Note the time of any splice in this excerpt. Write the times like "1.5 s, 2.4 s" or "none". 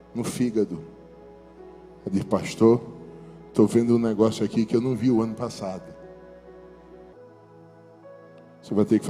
7.1 s